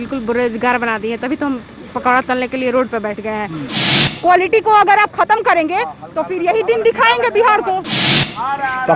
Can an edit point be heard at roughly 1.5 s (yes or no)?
no